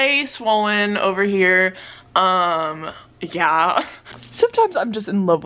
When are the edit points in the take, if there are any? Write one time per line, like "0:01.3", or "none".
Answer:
0:04.0

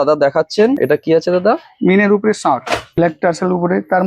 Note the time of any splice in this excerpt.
0:00.8
0:03.0

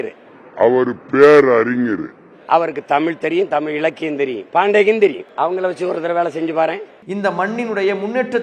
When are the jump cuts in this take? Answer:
0:05.2
0:06.9

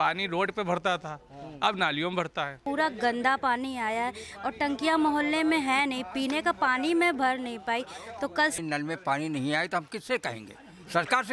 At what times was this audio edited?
0:02.6
0:08.6

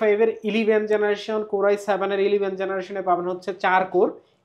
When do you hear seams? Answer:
none

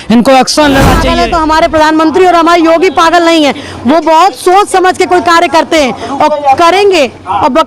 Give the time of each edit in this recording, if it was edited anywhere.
0:01.1

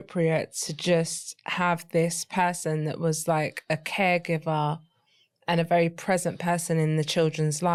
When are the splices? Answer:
none

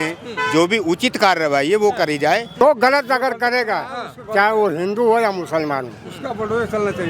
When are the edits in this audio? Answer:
0:02.6

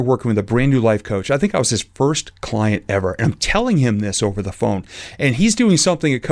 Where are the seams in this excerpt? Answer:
none

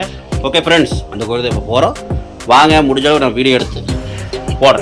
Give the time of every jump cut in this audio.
none

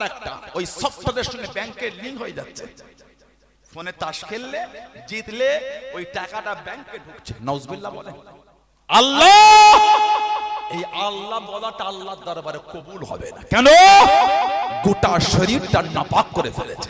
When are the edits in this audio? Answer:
0:09.0

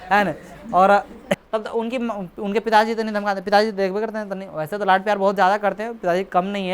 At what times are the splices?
0:01.4

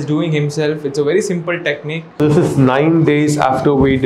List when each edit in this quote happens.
0:02.2

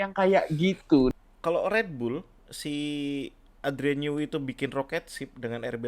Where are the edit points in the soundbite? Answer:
0:01.1

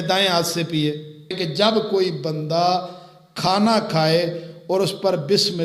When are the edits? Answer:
0:01.4

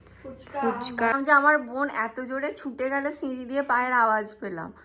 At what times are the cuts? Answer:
0:01.1

